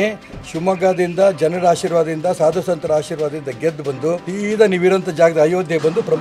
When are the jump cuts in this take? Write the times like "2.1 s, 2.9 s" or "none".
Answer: 4.3 s